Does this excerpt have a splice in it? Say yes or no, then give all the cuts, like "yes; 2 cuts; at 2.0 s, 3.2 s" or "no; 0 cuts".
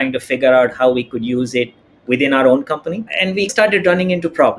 no; 0 cuts